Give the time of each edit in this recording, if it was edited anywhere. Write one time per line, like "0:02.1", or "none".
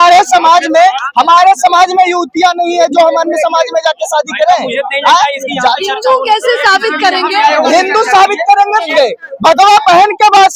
0:08.9